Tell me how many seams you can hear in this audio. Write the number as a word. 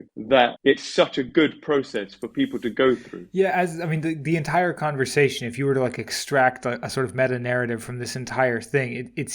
one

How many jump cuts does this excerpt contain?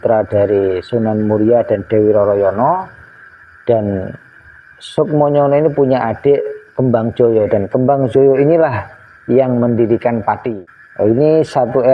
one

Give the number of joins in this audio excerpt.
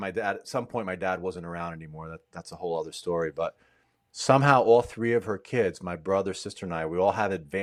zero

